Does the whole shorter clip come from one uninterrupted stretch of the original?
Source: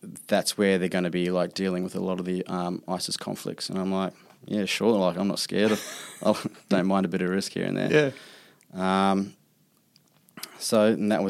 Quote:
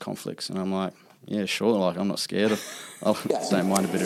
yes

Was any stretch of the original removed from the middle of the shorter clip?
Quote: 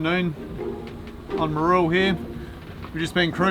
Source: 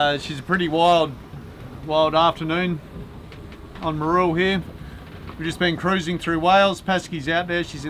no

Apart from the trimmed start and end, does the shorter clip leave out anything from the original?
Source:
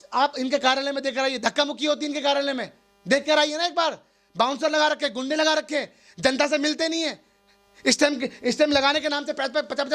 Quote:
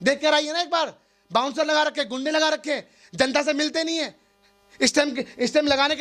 no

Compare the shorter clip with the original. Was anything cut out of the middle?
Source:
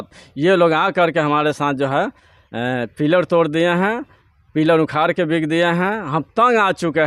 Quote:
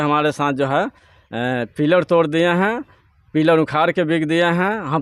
no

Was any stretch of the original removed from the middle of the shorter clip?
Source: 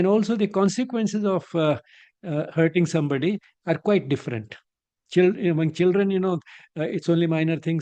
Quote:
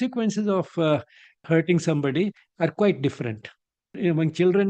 yes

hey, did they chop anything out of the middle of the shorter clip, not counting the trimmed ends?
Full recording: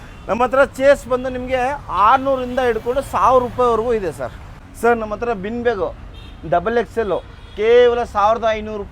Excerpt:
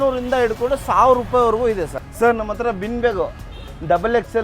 yes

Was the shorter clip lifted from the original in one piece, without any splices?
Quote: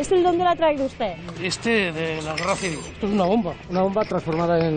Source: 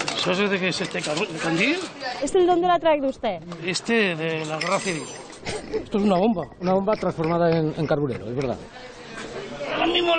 no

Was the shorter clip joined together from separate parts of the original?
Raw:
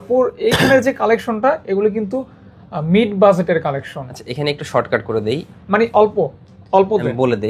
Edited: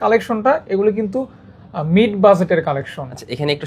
no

